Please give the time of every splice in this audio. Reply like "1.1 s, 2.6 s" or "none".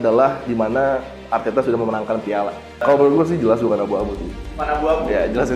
2.8 s